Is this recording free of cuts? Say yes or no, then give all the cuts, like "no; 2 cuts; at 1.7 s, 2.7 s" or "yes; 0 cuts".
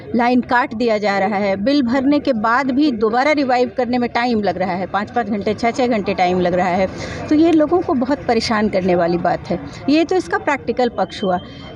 yes; 0 cuts